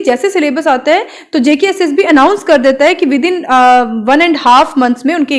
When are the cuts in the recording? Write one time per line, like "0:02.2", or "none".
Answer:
none

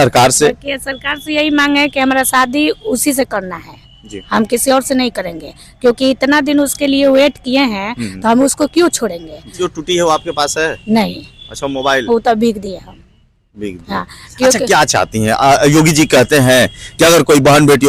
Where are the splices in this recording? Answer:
0:09.6

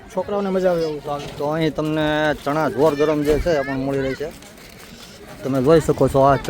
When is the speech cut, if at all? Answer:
0:01.0

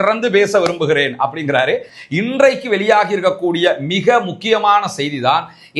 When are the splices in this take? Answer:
0:01.9

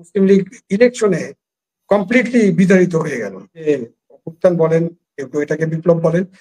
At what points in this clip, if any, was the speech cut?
0:03.7

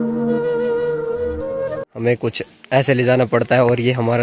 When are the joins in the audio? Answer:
0:01.9

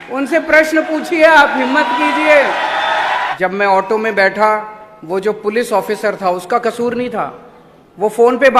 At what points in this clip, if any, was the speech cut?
0:03.3

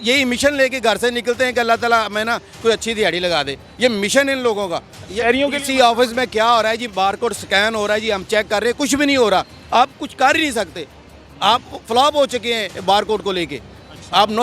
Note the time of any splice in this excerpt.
0:04.9

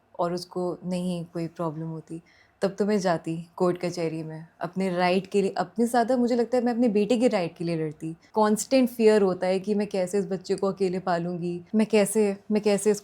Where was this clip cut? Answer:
0:08.2
0:11.6

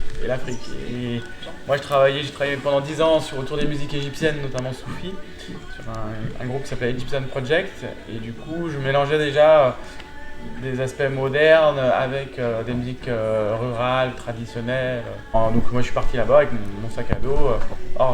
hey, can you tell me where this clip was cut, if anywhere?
0:15.3

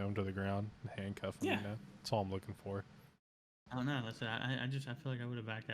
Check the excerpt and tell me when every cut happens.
0:03.6

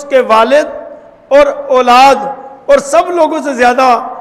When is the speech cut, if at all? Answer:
none

